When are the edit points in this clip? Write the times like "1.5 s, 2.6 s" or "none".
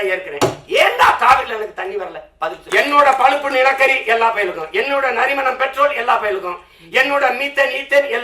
2.5 s